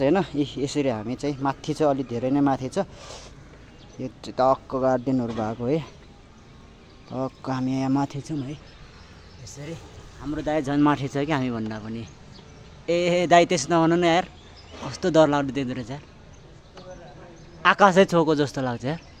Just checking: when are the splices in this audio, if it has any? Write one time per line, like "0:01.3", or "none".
none